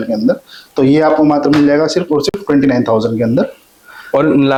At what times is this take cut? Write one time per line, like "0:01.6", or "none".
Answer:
none